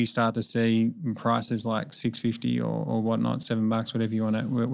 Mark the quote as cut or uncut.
uncut